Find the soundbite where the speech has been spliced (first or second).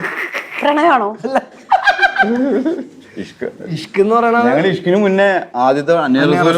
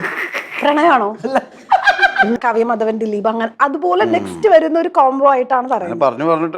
second